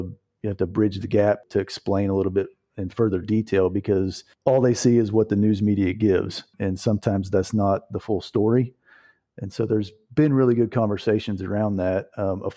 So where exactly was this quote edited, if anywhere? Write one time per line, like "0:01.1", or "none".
0:01.4
0:04.2

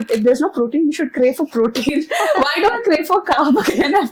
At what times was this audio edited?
none

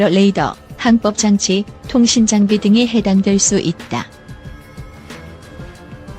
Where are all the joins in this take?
0:04.1

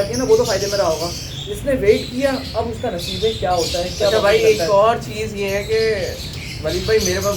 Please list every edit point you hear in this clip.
none

